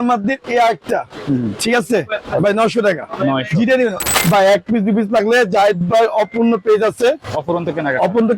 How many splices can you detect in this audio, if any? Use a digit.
1